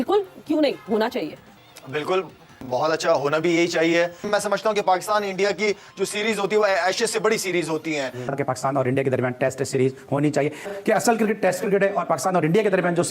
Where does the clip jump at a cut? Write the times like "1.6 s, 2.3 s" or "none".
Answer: 4.3 s, 8.2 s